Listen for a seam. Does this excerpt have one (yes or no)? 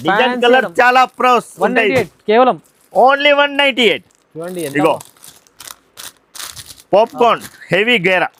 no